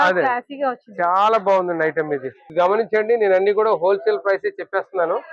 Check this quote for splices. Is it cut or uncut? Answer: cut